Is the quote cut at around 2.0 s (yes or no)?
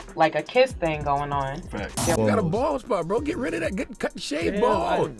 yes